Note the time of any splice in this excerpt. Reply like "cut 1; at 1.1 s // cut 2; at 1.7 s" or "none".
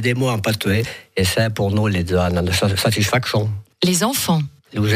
cut 1; at 3.6 s